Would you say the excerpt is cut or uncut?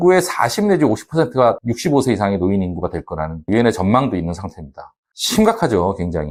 uncut